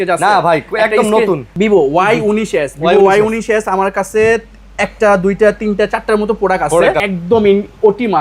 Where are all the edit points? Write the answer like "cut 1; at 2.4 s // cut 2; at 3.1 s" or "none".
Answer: cut 1; at 1.5 s // cut 2; at 7.0 s